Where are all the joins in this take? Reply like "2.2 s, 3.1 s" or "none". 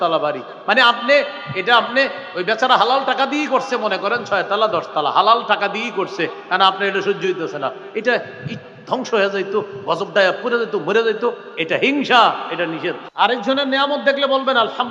13.0 s